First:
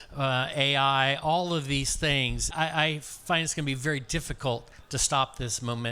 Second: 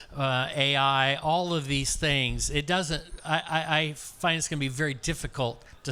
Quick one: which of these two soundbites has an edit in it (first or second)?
first